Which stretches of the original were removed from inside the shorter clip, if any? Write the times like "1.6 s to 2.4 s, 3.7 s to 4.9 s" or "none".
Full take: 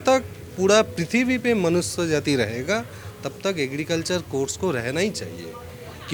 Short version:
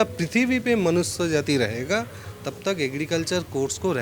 none